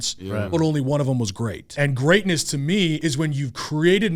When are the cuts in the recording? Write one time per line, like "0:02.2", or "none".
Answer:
0:01.6
0:03.0